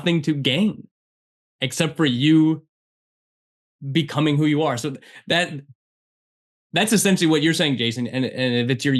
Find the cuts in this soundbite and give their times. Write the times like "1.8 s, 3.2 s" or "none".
none

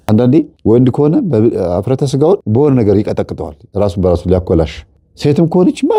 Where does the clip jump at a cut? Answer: none

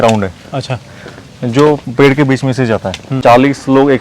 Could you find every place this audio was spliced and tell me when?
3.1 s

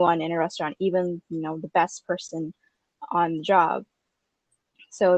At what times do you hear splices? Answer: none

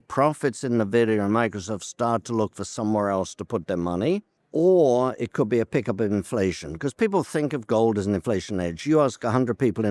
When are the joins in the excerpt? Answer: 4.4 s

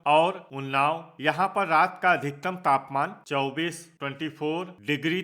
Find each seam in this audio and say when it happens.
1.0 s

